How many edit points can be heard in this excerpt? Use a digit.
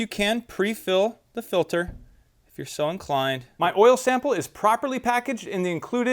1